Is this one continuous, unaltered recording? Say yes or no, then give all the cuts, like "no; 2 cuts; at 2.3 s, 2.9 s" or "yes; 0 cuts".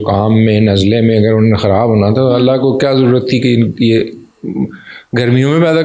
yes; 0 cuts